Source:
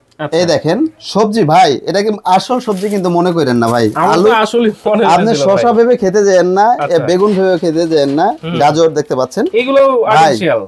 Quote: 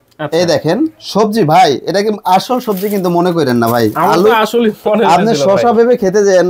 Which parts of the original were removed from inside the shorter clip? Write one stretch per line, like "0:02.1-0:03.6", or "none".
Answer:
none